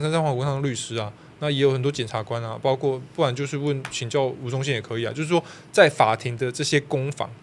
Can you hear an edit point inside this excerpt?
no; 0 cuts

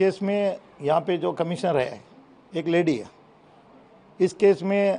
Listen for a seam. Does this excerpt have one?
no; 0 cuts

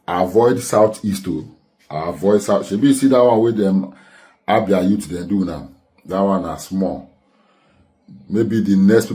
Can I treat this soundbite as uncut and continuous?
yes; 0 cuts

